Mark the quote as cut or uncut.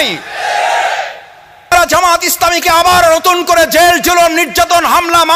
cut